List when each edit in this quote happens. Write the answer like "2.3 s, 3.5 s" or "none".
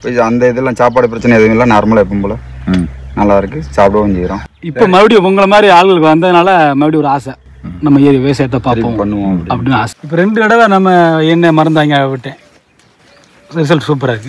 4.4 s, 9.9 s